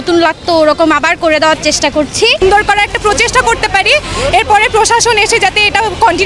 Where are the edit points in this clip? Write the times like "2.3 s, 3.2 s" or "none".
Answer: 2.4 s